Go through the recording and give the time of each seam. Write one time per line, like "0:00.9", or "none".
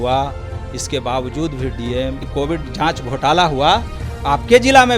0:02.3